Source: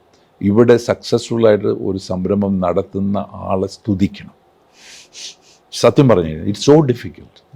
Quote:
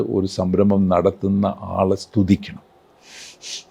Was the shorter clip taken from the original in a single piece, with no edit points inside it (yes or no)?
yes